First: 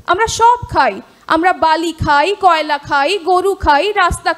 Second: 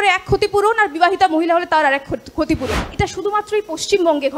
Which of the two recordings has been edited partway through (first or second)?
second